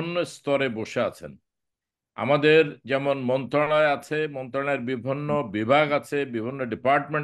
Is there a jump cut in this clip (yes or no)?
no